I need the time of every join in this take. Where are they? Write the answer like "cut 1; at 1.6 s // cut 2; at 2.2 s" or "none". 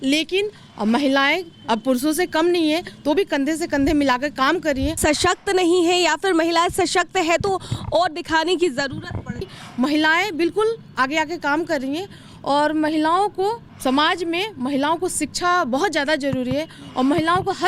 cut 1; at 4.9 s // cut 2; at 9.6 s // cut 3; at 13.7 s